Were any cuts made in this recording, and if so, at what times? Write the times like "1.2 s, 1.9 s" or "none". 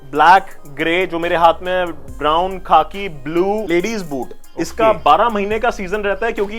3.7 s